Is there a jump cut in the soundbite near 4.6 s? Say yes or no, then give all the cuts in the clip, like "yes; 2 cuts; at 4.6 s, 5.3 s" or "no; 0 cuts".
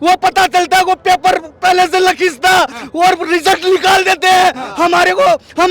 no; 0 cuts